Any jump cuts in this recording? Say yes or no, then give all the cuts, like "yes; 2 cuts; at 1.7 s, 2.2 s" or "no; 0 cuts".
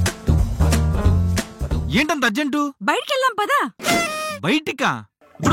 no; 0 cuts